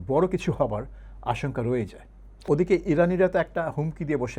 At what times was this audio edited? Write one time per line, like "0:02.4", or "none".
0:02.3